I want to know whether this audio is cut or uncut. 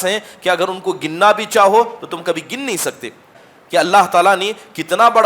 cut